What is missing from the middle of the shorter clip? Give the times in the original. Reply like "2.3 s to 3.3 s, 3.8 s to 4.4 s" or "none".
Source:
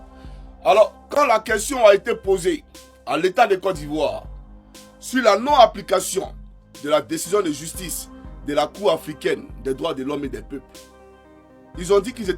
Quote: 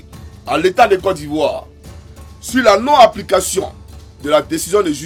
none